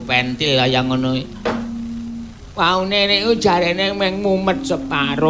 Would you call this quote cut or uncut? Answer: uncut